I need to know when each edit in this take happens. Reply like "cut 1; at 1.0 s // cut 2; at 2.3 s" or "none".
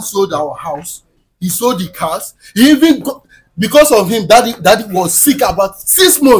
none